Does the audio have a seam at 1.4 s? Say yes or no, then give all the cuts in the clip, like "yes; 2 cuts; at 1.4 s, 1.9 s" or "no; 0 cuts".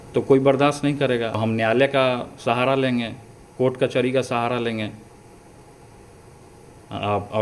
yes; 1 cut; at 1.4 s